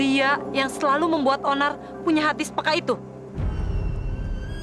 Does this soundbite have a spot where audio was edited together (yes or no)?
no